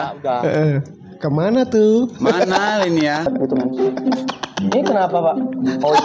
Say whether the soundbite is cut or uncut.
cut